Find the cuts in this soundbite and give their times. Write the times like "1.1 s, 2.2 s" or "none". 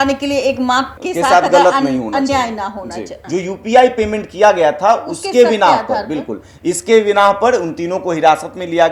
1.0 s, 3.2 s

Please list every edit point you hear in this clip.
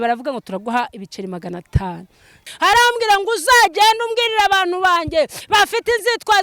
2.5 s

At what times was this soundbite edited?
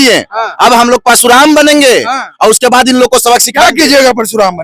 none

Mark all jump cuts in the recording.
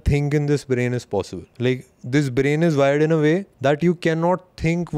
1.4 s, 3.5 s

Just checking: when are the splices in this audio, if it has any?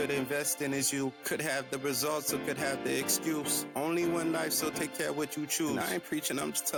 none

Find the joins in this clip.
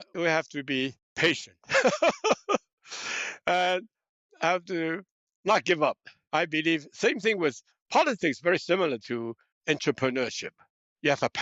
none

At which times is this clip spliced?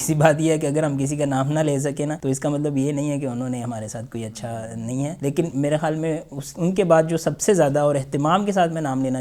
2.2 s, 5.2 s

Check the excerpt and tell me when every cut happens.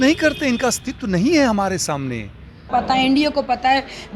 2.6 s

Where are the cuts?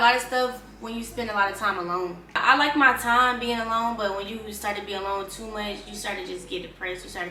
none

